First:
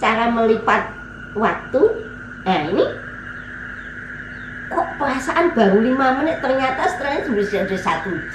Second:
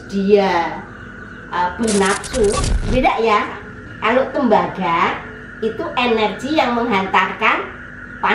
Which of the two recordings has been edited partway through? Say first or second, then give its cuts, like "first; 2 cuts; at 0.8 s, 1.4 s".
second; 1 cut; at 2.7 s